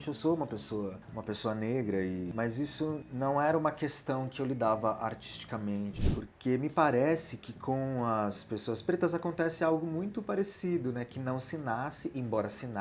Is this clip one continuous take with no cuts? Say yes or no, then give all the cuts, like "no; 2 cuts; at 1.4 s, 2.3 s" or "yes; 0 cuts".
no; 2 cuts; at 2.3 s, 6.1 s